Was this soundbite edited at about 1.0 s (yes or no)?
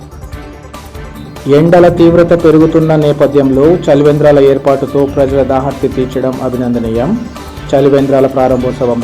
yes